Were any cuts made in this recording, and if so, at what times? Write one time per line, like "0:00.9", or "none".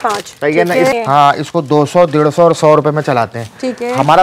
0:00.9